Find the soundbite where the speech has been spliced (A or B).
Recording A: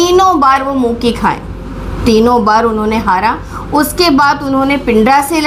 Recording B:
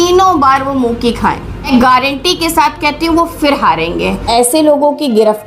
B